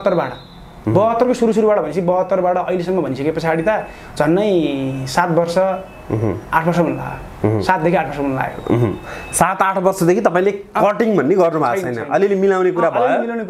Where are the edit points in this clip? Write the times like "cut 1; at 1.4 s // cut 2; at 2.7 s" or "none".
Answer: none